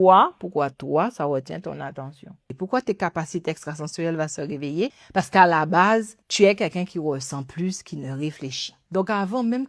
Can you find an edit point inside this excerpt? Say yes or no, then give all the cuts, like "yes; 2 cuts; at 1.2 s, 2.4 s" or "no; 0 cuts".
yes; 4 cuts; at 2.5 s, 5.0 s, 6.2 s, 8.8 s